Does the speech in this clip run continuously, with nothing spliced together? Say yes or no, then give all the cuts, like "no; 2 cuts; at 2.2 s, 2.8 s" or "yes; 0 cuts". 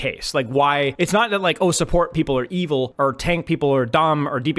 no; 2 cuts; at 0.9 s, 2.9 s